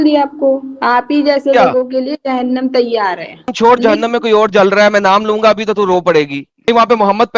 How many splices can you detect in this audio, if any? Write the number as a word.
two